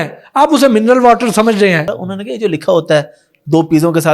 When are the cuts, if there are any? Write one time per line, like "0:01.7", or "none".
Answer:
0:01.9